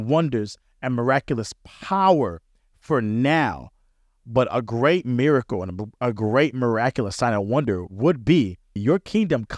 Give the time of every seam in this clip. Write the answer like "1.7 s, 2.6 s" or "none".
7.9 s, 8.8 s